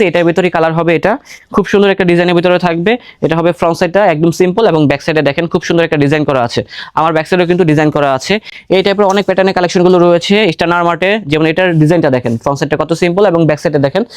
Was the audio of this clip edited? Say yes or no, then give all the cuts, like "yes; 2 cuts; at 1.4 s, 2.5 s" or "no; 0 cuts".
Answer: no; 0 cuts